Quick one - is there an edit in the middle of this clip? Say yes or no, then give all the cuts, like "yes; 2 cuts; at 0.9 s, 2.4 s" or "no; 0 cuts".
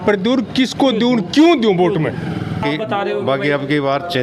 yes; 1 cut; at 2.6 s